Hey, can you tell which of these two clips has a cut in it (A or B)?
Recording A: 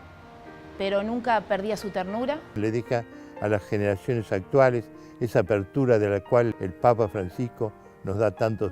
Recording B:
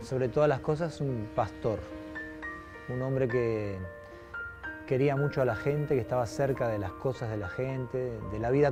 A